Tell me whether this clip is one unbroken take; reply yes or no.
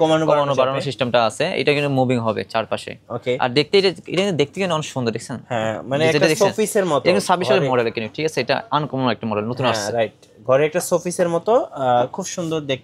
yes